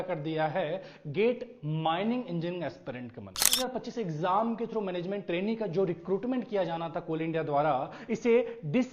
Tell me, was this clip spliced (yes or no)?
yes